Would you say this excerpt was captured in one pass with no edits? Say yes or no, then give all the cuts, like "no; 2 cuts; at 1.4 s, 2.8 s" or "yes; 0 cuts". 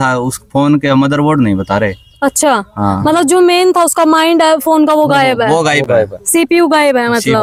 yes; 0 cuts